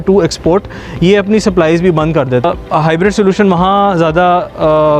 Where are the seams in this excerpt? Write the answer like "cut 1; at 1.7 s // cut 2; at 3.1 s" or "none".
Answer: cut 1; at 2.4 s